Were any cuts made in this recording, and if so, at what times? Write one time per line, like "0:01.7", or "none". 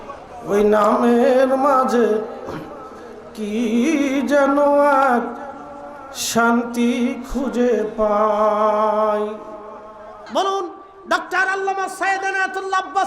0:10.2